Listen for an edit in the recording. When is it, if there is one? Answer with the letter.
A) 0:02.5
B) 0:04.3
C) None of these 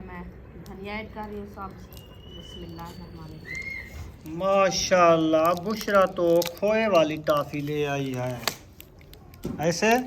B